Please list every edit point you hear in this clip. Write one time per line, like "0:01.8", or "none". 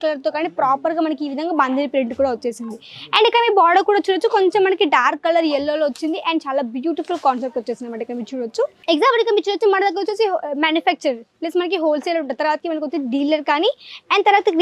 0:08.8